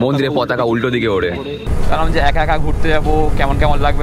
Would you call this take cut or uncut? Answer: cut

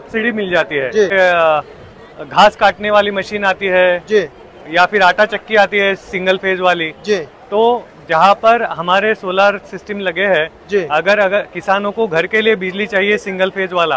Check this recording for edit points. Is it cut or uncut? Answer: cut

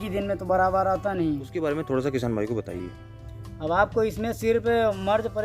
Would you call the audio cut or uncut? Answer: cut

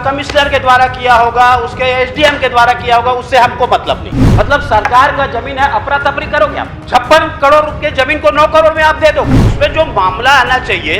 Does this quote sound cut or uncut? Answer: cut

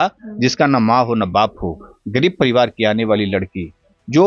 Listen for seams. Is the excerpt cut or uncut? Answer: uncut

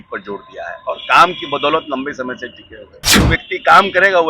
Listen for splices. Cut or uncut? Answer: cut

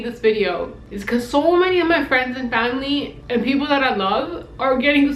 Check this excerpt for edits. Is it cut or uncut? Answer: uncut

